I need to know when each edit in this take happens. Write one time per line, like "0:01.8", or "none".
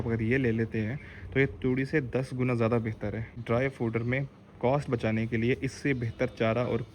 0:03.3